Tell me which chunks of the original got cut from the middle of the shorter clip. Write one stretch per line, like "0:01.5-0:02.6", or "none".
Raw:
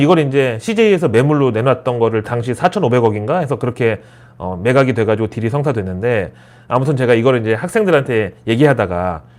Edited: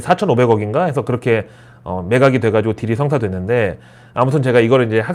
none